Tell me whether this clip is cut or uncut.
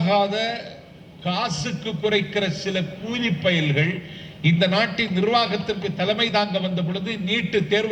uncut